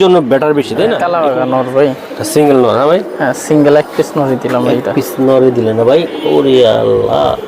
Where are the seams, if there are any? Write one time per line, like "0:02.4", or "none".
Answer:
0:01.0